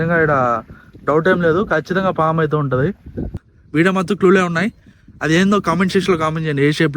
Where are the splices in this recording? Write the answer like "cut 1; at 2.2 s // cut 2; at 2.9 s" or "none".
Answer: cut 1; at 3.5 s